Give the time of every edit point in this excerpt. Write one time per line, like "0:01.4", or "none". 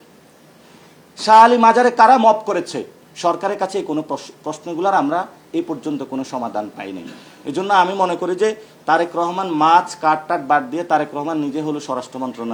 none